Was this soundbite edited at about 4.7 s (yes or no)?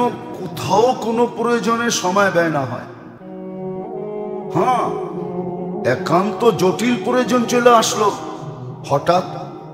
no